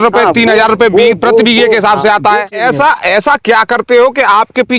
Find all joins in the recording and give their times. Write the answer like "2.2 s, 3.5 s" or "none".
2.5 s

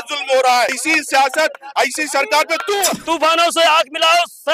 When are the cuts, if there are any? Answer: 0.8 s, 2.9 s

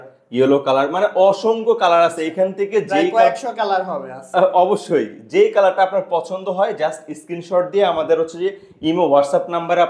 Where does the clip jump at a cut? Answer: none

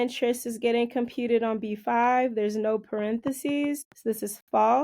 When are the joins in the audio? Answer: 3.9 s

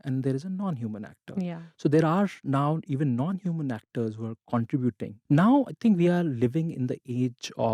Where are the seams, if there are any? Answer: 5.1 s

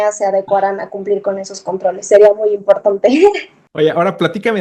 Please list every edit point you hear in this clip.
none

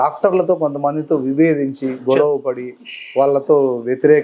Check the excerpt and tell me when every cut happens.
none

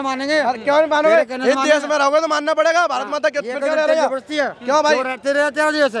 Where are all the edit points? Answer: none

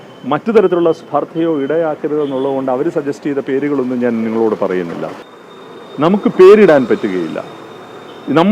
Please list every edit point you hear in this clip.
5.2 s

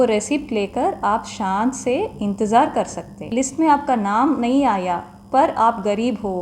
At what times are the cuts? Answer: 3.2 s

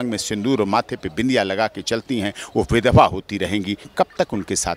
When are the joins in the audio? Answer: none

